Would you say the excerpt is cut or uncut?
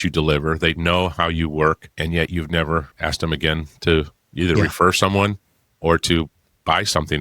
cut